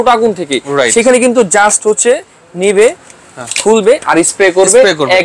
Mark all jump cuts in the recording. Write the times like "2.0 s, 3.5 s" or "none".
none